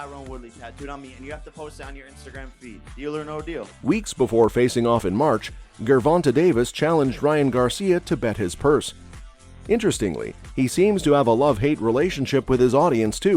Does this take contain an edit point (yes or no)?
no